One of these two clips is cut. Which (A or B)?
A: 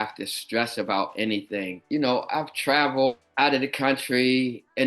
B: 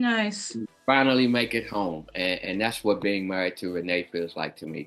A